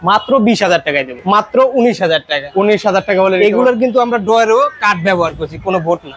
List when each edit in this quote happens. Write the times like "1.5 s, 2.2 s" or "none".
1.2 s